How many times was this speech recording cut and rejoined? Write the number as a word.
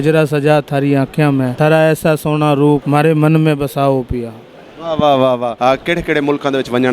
three